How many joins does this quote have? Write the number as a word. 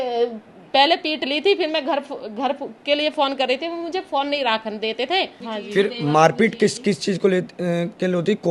one